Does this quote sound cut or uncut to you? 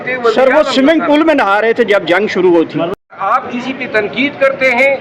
cut